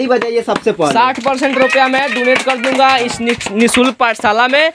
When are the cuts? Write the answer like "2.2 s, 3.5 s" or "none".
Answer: none